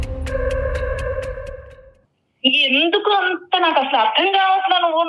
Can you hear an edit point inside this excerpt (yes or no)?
no